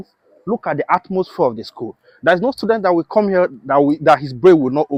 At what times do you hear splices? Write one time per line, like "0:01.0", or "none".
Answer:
none